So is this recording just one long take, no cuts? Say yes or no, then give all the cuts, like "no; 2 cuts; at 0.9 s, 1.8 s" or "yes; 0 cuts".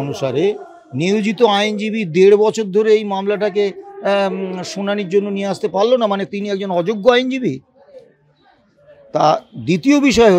yes; 0 cuts